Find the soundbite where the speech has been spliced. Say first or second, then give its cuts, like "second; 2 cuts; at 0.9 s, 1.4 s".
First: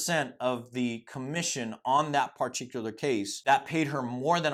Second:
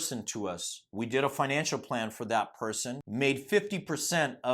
second; 1 cut; at 3.0 s